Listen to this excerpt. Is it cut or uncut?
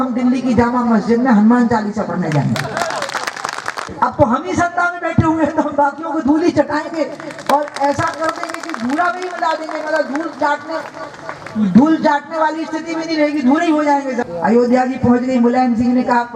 cut